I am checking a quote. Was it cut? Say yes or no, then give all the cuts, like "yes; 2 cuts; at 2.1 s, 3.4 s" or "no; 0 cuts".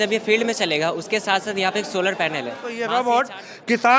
yes; 1 cut; at 2.7 s